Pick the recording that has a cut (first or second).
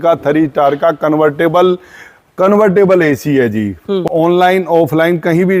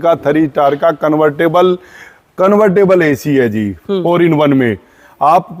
first